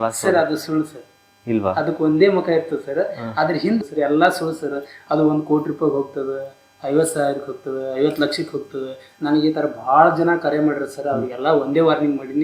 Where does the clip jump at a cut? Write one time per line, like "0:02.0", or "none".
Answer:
0:03.8